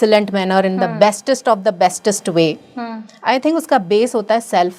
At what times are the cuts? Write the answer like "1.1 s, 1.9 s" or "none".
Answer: none